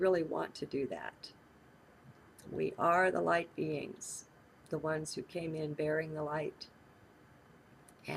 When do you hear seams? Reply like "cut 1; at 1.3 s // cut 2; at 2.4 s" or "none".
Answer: cut 1; at 3.1 s